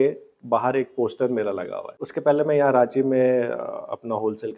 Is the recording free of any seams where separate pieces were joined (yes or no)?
no